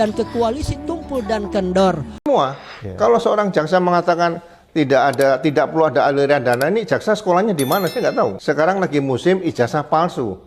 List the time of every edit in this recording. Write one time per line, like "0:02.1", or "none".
0:02.1
0:08.4